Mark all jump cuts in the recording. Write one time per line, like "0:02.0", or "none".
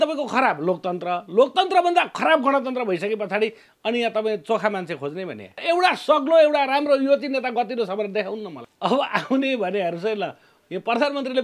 0:05.6
0:08.6